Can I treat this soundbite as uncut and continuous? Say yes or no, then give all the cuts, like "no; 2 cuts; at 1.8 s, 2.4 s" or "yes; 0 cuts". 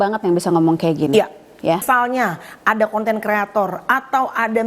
no; 1 cut; at 1.8 s